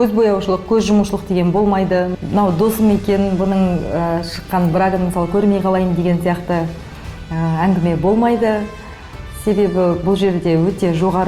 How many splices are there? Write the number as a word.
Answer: one